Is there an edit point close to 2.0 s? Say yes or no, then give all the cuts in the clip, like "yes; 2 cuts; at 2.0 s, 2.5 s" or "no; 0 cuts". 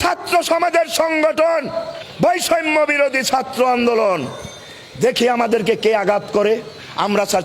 yes; 1 cut; at 2.0 s